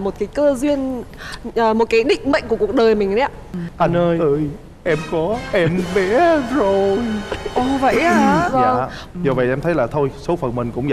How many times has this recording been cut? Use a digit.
2